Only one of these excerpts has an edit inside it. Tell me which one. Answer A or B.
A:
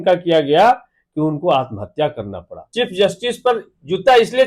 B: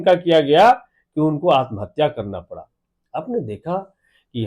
A